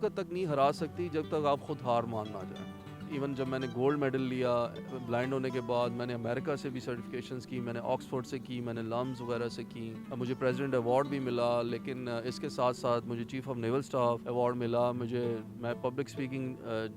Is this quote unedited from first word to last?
yes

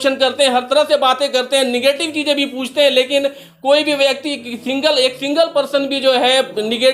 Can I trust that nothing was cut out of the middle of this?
yes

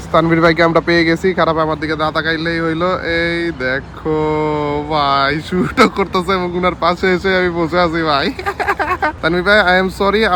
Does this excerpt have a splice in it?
no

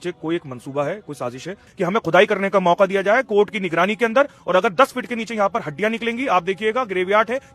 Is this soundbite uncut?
no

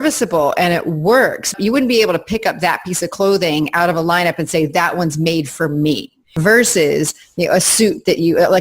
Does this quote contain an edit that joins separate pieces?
yes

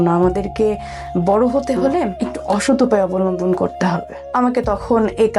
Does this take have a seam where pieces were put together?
yes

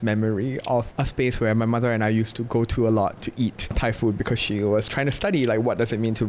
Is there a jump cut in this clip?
no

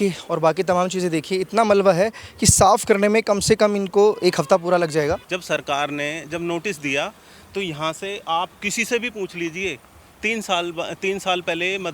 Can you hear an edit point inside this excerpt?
yes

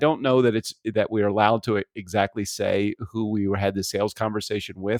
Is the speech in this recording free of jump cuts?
yes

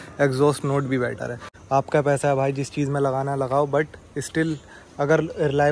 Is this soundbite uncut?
no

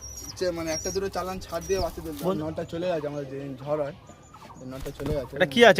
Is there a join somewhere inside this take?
yes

